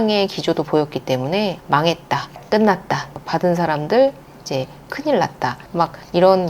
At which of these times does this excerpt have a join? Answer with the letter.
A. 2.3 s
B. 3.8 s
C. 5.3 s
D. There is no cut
A